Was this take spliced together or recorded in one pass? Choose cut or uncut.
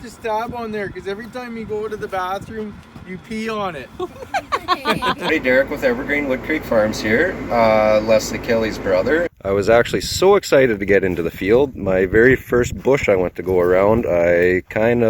cut